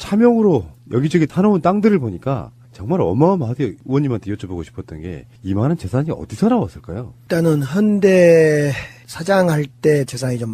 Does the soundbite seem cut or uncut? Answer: uncut